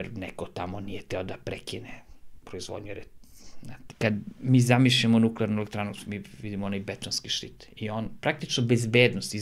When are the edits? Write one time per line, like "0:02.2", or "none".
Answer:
0:03.8

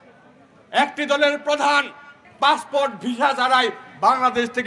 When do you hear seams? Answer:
0:02.2

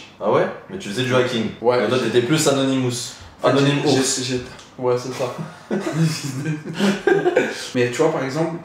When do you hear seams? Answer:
0:07.7

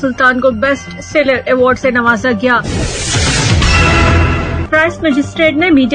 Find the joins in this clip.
0:02.6
0:04.6

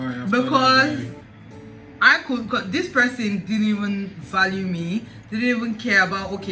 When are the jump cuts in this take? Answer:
none

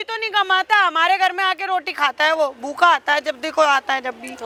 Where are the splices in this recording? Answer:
none

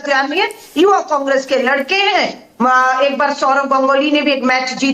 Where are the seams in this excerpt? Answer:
none

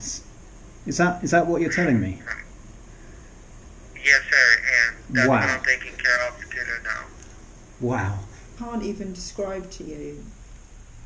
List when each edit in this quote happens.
0:08.5

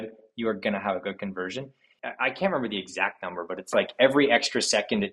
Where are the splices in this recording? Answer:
0:01.9

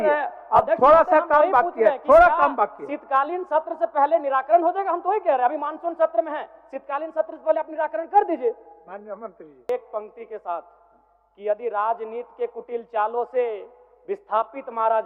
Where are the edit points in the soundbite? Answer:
0:09.7

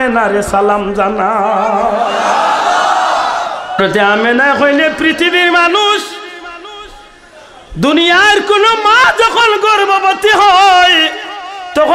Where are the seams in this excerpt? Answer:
0:03.8

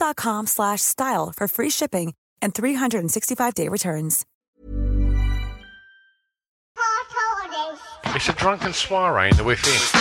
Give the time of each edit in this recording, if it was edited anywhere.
0:06.6

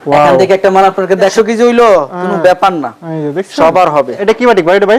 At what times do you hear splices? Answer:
0:01.3
0:04.2

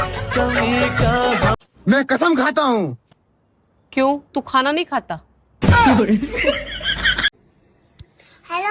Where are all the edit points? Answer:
0:01.7
0:07.3

